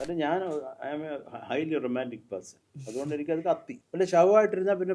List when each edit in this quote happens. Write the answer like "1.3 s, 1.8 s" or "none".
3.8 s